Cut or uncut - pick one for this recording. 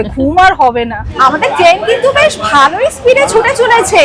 cut